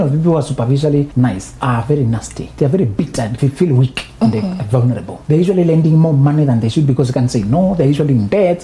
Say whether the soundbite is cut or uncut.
cut